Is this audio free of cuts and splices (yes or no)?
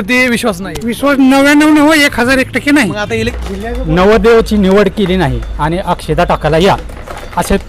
no